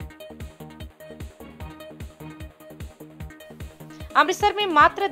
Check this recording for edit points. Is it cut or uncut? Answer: cut